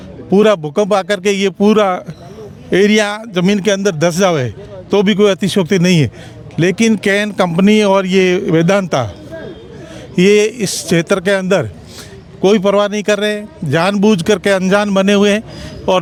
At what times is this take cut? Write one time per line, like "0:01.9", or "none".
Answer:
none